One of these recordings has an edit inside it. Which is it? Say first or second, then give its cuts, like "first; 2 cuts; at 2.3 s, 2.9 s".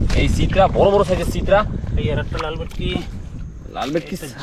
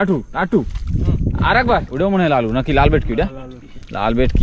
second; 1 cut; at 1.9 s